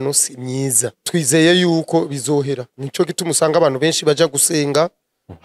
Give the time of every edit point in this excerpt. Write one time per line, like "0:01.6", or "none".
0:01.0
0:02.8

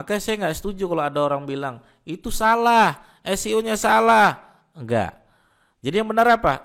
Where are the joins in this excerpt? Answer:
none

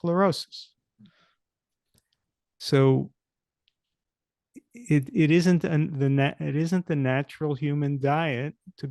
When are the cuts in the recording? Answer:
none

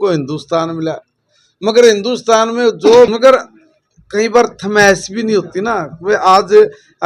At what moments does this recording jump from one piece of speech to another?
0:03.1

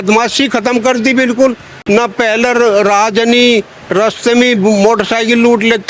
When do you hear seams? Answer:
none

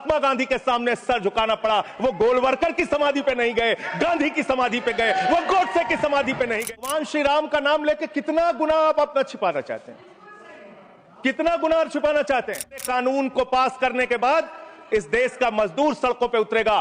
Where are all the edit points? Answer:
0:06.8
0:12.8

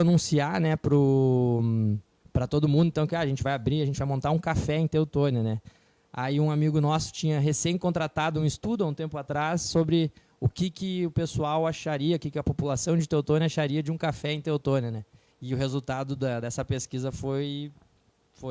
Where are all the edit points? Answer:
none

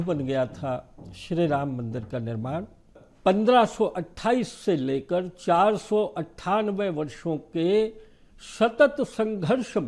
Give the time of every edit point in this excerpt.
0:03.0

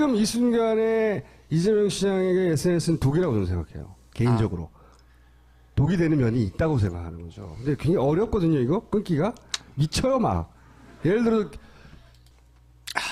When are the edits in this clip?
0:11.1

